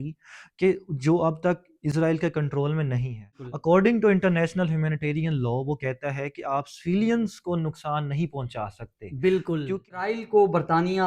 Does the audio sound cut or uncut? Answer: cut